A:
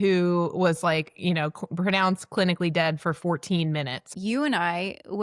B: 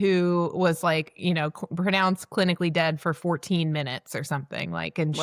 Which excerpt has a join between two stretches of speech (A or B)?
A